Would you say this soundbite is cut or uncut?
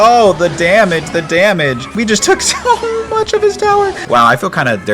cut